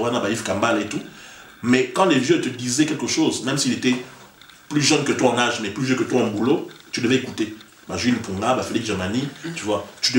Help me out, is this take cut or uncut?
uncut